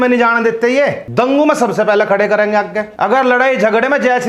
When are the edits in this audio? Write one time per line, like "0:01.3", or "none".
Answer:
0:01.0
0:02.8